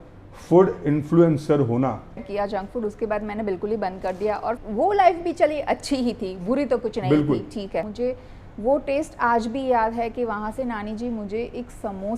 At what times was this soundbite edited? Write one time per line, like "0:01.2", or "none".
0:02.2
0:04.6
0:07.9